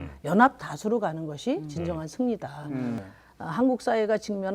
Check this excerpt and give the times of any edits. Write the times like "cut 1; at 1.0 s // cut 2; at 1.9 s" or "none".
cut 1; at 3.0 s